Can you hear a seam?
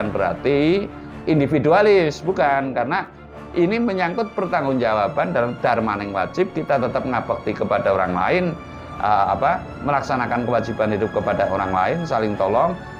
no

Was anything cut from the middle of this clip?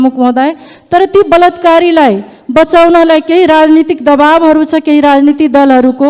no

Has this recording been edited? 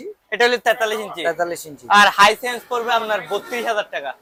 no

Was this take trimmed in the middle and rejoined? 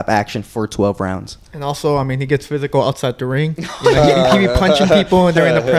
no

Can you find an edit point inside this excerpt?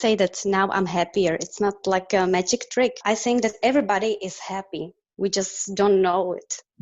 yes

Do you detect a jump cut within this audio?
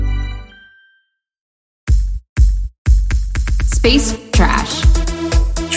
yes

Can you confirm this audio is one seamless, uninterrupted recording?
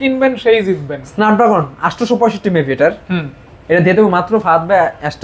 yes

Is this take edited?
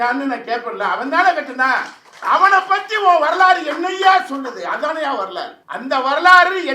yes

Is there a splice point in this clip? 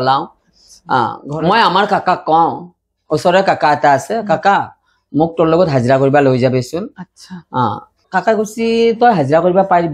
yes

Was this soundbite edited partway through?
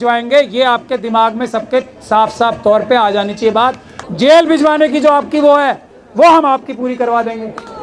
yes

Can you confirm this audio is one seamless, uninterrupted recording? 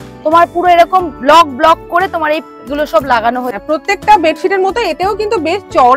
no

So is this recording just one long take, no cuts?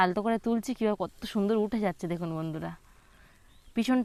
yes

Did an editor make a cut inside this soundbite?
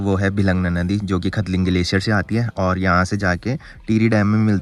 no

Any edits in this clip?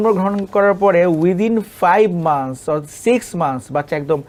no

